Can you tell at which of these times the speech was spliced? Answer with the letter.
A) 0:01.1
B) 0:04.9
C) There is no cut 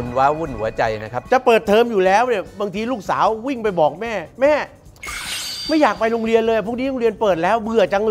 A